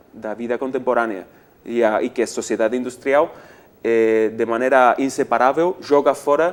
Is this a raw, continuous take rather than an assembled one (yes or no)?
yes